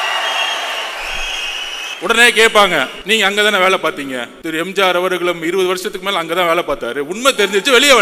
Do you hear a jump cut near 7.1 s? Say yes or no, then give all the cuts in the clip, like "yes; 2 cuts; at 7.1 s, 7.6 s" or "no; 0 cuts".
no; 3 cuts; at 1.8 s, 3.0 s, 4.3 s